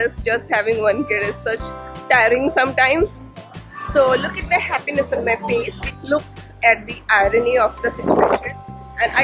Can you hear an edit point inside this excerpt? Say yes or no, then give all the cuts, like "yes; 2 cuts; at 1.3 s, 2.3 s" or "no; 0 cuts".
yes; 2 cuts; at 3.7 s, 5.8 s